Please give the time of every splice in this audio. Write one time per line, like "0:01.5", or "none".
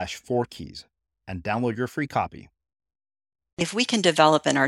0:03.6